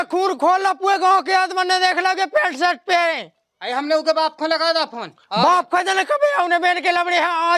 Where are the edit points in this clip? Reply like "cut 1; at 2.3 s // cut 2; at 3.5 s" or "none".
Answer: none